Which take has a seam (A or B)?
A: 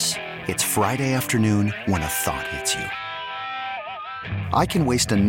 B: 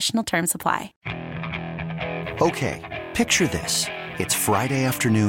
B